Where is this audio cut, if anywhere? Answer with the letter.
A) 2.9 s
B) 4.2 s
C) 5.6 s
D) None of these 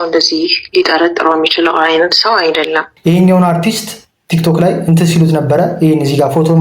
A